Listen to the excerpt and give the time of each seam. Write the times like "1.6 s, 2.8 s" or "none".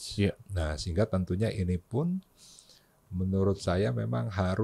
none